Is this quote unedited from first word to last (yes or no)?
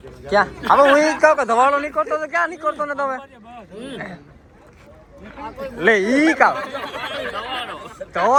yes